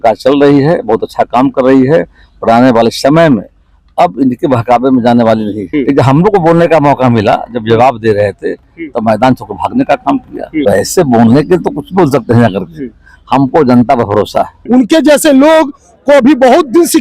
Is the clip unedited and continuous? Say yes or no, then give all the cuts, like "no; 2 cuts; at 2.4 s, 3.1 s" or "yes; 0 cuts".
no; 3 cuts; at 5.6 s, 10.6 s, 14.5 s